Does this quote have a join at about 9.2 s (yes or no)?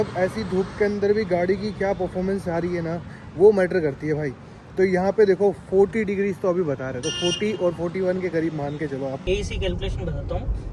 yes